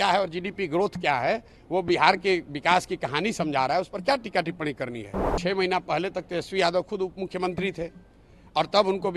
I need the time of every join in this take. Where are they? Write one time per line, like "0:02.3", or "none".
0:05.3